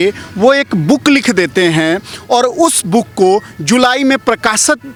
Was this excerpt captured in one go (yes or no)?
yes